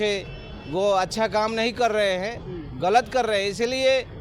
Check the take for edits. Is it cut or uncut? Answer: uncut